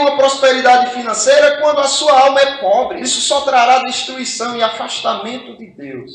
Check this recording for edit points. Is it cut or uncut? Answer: cut